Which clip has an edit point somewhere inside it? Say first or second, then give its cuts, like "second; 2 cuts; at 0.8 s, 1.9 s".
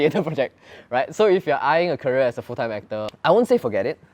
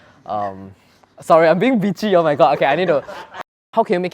second; 1 cut; at 3.2 s